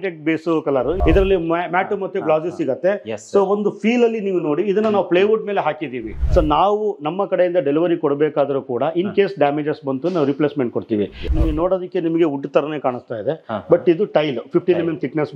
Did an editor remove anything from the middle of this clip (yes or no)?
yes